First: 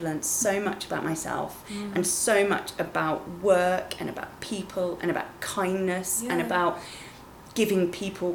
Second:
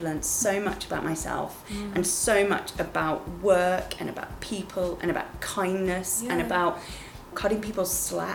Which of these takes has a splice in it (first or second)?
second